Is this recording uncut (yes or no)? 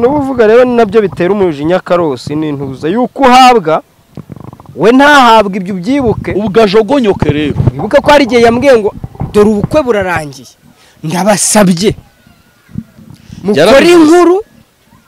yes